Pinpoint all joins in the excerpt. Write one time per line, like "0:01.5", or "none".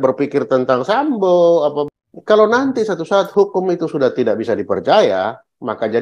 0:01.9